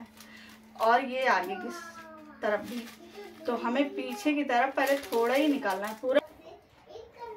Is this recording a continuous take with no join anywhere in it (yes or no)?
no